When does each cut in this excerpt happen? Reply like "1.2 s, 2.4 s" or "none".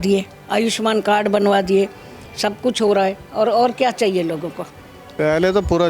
5.0 s